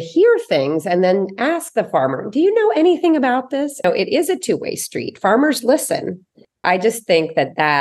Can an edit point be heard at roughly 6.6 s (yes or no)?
yes